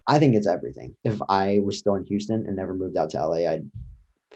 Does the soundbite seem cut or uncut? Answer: cut